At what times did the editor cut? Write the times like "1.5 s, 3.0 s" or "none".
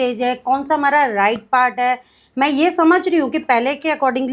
2.2 s

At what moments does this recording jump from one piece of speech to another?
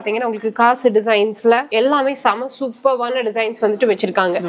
none

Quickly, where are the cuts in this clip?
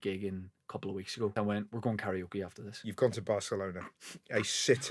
1.3 s, 2.8 s

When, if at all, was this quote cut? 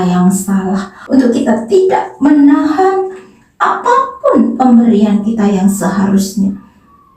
1.0 s

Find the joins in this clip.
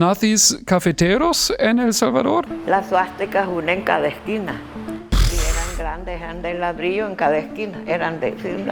2.5 s

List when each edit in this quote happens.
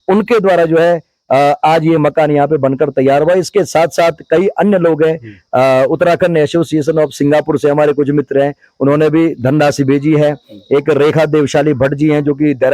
none

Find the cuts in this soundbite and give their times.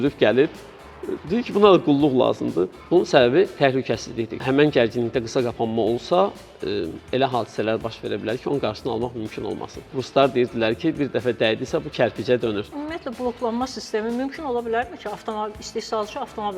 2.8 s, 4.4 s, 10.0 s, 12.8 s

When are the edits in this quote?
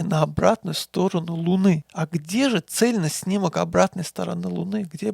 1.8 s

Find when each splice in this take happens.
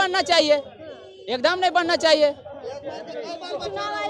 none

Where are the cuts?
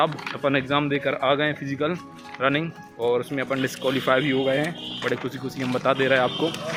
none

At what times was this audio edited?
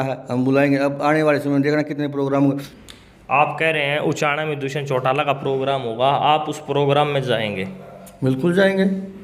2.7 s

